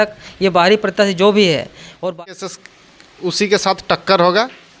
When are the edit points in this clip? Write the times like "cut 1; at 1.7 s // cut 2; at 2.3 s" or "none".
cut 1; at 2.1 s